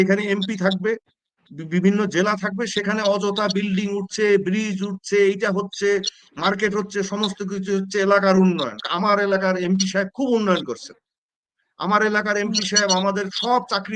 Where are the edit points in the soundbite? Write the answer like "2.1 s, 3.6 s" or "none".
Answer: none